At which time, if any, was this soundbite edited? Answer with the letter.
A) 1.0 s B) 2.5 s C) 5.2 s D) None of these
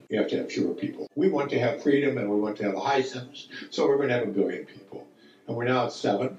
A